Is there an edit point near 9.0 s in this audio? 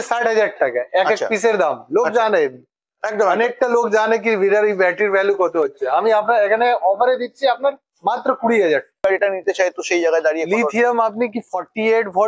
yes; 1 cut; at 9.0 s

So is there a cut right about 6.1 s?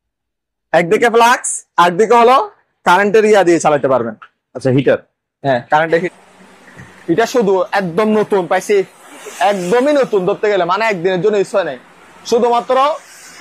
yes; 1 cut; at 6.1 s

